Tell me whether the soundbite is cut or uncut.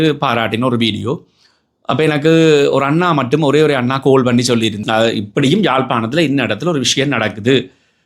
cut